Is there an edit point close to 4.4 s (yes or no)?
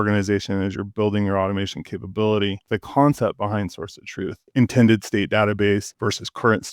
yes